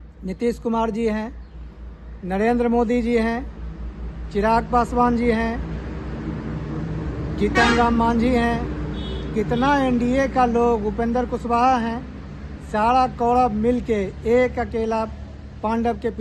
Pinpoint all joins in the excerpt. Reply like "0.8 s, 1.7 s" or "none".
none